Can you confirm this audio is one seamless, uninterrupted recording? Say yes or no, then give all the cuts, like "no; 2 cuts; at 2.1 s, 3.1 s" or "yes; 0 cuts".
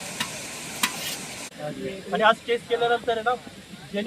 no; 1 cut; at 1.5 s